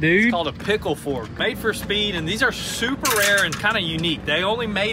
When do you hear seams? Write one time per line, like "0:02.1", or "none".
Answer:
0:01.3